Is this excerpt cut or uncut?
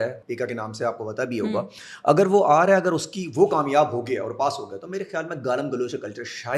uncut